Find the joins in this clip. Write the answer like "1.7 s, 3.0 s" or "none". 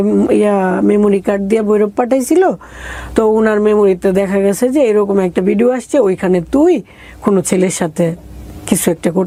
none